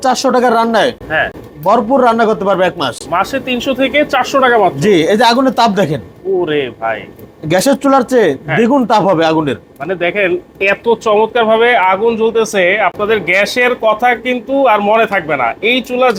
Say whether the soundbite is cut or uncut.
uncut